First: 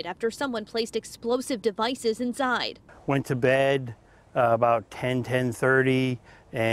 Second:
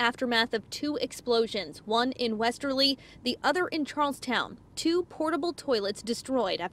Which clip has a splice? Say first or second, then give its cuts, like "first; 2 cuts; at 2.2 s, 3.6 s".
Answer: first; 1 cut; at 2.8 s